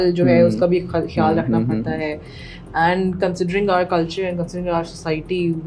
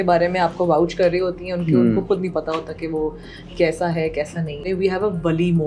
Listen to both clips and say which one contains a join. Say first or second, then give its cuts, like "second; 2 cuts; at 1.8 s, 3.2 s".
second; 1 cut; at 4.6 s